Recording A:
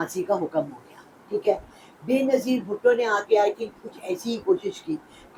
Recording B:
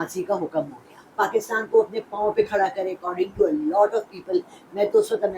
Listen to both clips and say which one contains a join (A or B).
B